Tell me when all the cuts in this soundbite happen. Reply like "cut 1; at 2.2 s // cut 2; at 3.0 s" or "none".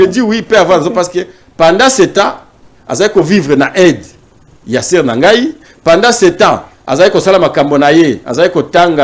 none